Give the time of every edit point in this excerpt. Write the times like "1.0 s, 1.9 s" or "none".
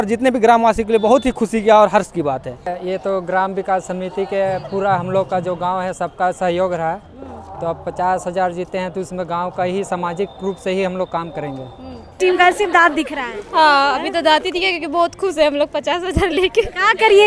2.7 s, 12.2 s